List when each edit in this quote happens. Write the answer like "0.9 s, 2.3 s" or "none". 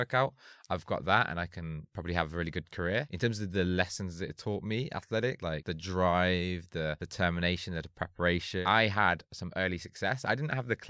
3.1 s, 5.6 s, 7.0 s, 8.6 s